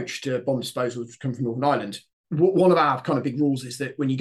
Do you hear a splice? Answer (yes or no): yes